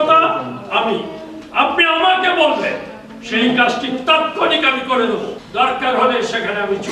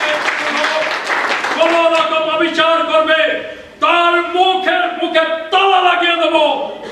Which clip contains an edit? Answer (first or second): first